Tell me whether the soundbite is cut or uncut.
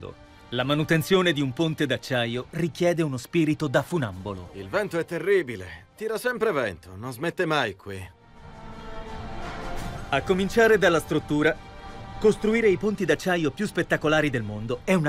uncut